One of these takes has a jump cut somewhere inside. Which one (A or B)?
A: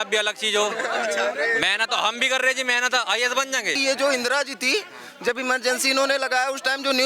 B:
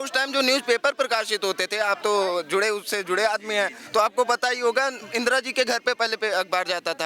A